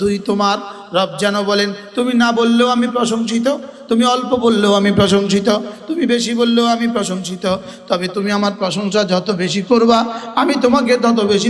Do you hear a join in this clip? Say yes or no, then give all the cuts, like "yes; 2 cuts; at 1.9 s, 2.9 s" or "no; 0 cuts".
no; 0 cuts